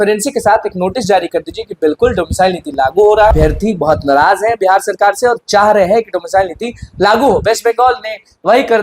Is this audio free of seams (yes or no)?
no